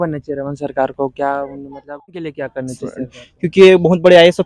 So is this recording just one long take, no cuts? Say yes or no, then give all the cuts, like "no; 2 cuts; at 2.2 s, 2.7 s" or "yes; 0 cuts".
no; 1 cut; at 2.3 s